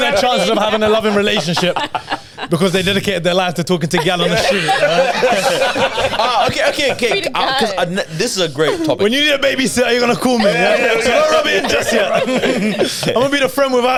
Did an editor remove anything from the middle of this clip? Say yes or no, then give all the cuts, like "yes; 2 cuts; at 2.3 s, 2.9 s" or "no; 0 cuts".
no; 0 cuts